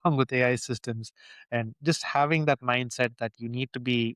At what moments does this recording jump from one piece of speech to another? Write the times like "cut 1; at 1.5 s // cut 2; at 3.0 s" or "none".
none